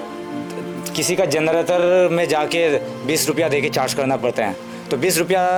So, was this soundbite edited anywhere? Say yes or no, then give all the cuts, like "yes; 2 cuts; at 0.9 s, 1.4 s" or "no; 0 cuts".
no; 0 cuts